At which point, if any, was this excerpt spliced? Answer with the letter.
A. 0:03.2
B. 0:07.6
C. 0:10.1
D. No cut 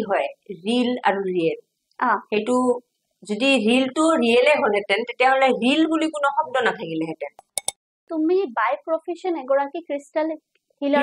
B